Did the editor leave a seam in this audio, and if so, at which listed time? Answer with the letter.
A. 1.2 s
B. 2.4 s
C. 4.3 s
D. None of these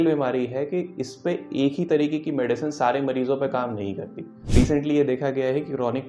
C